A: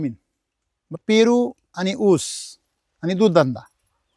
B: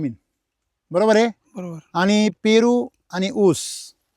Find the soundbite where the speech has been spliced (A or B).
A